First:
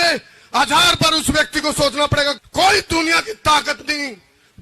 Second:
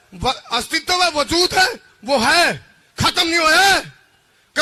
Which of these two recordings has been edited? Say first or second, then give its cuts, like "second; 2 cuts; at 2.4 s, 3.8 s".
first; 1 cut; at 2.4 s